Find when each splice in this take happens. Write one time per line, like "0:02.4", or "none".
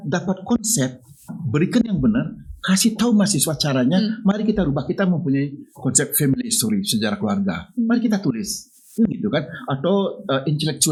none